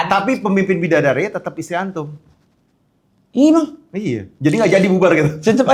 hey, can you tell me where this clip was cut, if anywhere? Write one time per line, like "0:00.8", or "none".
none